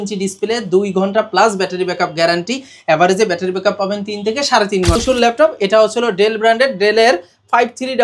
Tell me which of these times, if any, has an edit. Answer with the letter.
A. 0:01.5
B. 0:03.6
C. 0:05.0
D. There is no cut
C